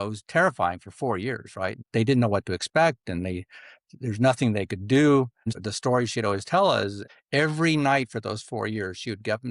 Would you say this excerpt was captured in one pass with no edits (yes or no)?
no